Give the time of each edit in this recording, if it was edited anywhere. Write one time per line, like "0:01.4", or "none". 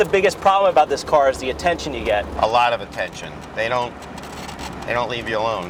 none